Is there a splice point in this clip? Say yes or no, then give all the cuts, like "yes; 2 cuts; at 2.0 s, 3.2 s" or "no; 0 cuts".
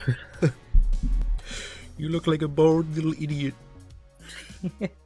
no; 0 cuts